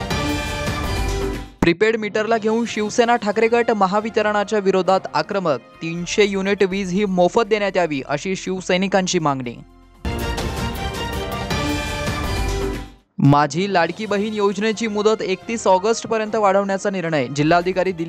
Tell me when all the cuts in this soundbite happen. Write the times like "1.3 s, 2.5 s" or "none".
1.0 s